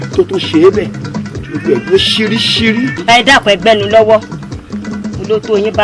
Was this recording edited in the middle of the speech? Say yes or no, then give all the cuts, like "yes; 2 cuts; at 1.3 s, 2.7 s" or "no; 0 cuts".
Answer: yes; 1 cut; at 3.0 s